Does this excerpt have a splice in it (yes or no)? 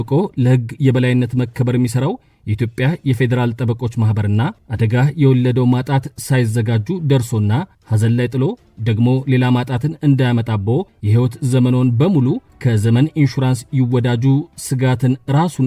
yes